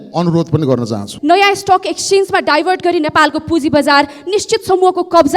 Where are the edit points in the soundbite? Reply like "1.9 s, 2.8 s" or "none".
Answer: 1.1 s